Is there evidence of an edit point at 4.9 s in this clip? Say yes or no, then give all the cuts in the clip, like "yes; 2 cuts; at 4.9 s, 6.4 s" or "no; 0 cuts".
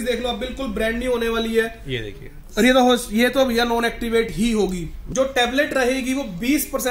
yes; 1 cut; at 4.9 s